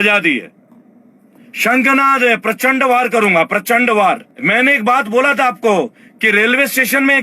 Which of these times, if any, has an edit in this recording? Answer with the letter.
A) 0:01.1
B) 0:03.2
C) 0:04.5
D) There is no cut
C